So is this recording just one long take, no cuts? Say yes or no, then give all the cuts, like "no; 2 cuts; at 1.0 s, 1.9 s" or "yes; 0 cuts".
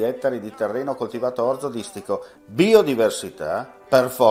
yes; 0 cuts